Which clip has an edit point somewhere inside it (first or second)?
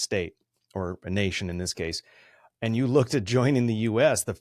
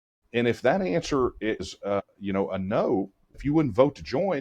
second